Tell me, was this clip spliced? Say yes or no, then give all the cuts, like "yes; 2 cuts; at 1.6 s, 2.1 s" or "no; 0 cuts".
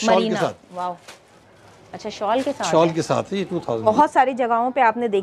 yes; 1 cut; at 3.9 s